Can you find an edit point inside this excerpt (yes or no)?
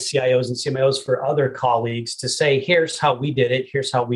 no